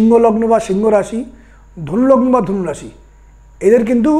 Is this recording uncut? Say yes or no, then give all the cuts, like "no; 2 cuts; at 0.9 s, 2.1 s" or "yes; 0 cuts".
yes; 0 cuts